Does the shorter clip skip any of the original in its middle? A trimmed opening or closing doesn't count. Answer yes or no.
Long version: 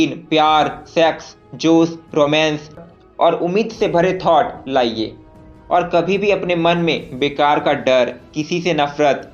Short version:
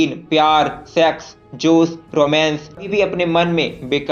yes